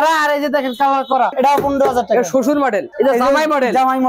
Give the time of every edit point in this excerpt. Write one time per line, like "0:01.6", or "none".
0:01.3
0:02.9